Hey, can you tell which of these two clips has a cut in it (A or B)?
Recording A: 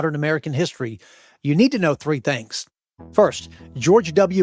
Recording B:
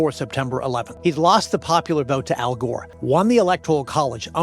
B